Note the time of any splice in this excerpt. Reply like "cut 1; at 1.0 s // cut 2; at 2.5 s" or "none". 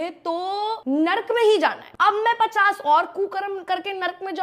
cut 1; at 0.8 s // cut 2; at 1.9 s